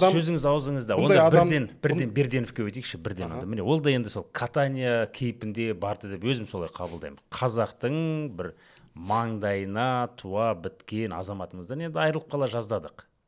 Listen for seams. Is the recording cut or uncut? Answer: uncut